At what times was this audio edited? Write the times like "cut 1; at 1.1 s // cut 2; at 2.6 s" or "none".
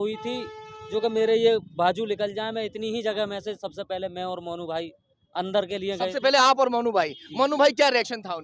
none